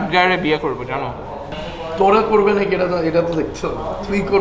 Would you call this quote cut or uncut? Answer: cut